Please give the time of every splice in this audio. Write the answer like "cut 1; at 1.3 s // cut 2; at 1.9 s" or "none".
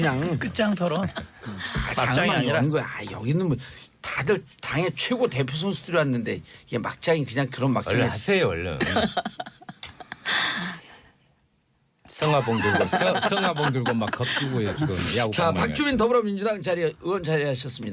none